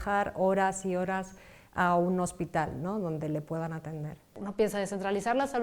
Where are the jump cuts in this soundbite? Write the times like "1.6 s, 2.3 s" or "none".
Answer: 4.4 s

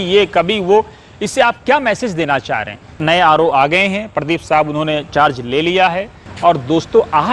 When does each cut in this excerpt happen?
2.9 s, 6.2 s

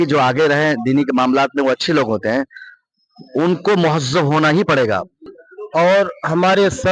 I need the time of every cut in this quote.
5.3 s

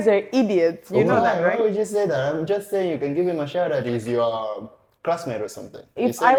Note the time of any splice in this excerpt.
none

